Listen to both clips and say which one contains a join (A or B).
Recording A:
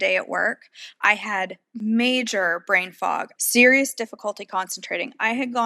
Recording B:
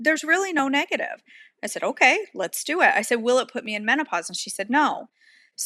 A